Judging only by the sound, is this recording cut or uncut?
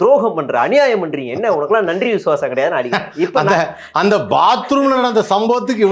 uncut